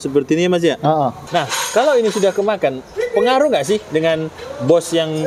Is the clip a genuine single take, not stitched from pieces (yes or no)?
no